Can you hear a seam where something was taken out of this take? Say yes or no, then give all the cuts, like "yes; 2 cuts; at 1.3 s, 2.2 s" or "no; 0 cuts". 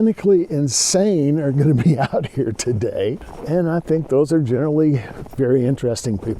yes; 2 cuts; at 3.3 s, 5.2 s